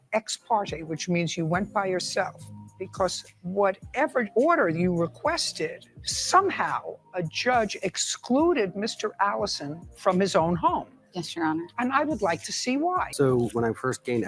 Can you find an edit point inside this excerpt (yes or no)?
yes